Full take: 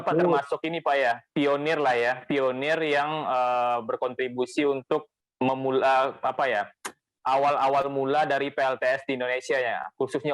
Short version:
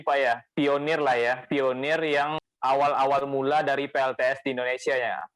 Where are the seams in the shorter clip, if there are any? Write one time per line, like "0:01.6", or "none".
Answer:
0:02.4